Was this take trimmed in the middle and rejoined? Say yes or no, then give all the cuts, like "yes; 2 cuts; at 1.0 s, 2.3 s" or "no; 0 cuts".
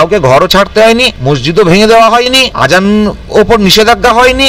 yes; 2 cuts; at 1.1 s, 2.5 s